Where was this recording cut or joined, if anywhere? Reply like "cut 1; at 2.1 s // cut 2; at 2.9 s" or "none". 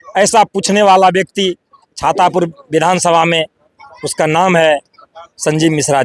none